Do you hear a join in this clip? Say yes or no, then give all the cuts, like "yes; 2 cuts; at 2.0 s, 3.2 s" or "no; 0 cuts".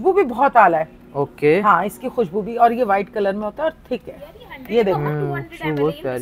no; 0 cuts